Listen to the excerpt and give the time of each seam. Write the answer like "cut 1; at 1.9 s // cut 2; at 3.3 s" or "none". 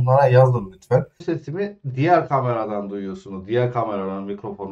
cut 1; at 1.2 s